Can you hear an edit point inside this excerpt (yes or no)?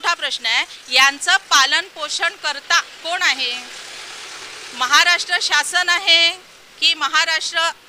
no